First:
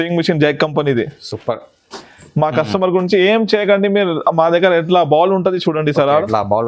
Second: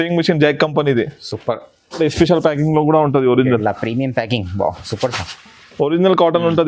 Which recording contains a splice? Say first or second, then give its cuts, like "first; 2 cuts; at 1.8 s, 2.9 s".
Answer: second; 1 cut; at 2.0 s